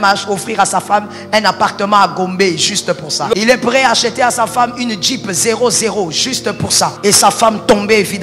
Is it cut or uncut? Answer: cut